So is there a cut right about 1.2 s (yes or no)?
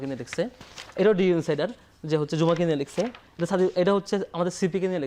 no